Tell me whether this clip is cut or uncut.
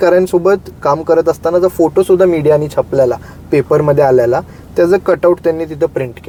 uncut